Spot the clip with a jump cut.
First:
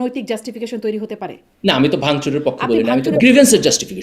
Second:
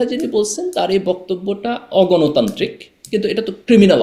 first; 2 cuts; at 1.4 s, 3.2 s

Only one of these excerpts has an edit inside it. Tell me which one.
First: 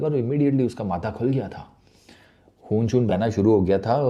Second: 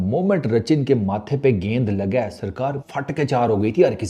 second; 1 cut; at 2.9 s

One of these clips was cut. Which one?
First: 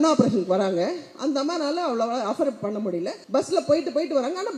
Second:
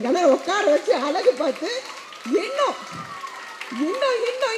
first; 1 cut; at 3.2 s

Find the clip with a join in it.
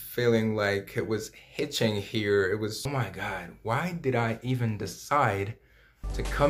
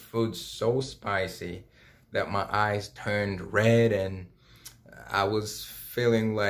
first; 1 cut; at 2.8 s

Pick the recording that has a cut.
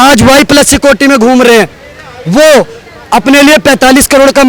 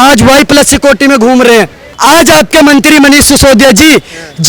second; 1 cut; at 1.8 s

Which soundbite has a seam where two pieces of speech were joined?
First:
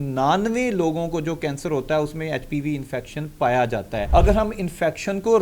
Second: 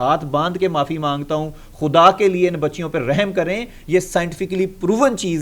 first; 1 cut; at 4.0 s

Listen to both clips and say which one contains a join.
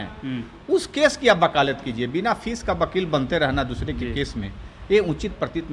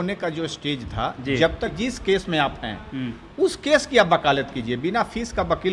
second; 1 cut; at 1.7 s

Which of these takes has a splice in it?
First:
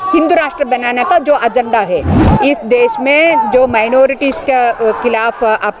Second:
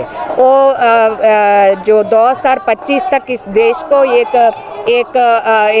first; 1 cut; at 2.1 s

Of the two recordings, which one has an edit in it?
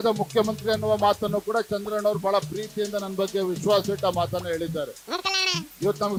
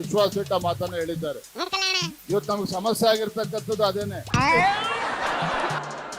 second; 1 cut; at 4.2 s

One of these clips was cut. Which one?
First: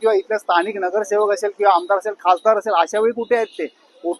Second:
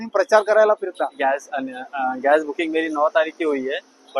second; 1 cut; at 1.2 s

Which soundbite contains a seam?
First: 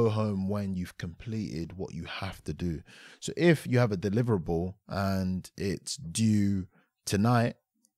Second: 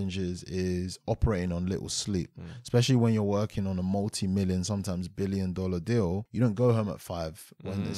second; 1 cut; at 6.3 s

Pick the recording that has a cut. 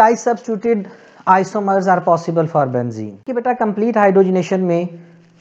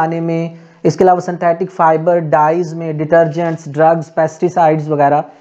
first; 1 cut; at 3.3 s

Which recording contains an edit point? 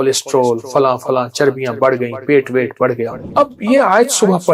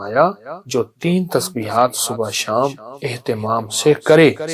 first; 1 cut; at 3.2 s

